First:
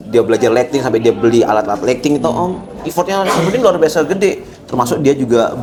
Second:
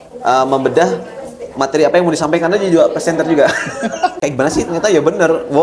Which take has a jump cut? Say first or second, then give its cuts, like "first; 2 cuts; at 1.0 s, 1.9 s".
second; 1 cut; at 4.1 s